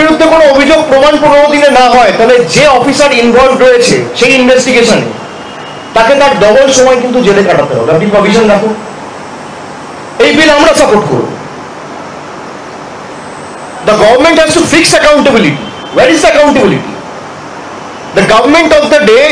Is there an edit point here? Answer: no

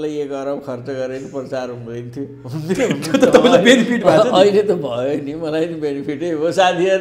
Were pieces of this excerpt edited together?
no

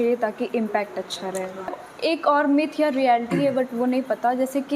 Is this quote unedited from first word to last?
no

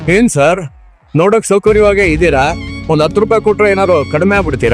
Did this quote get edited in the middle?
no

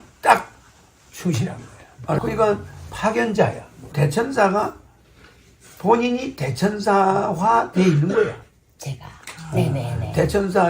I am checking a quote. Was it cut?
yes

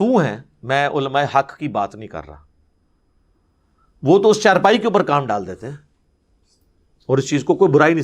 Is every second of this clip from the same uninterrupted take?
yes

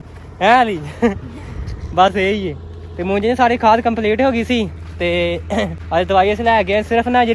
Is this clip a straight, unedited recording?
no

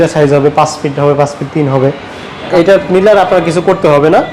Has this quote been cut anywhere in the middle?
yes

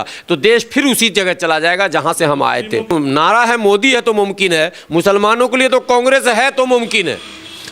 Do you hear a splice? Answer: yes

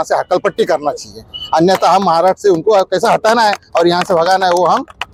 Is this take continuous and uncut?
yes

